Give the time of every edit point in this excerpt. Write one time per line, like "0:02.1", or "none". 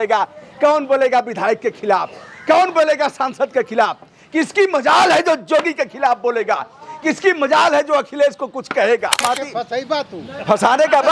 0:09.2